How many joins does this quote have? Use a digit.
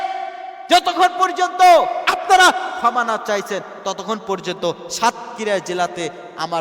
1